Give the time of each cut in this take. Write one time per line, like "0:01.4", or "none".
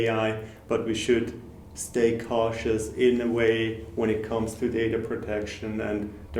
none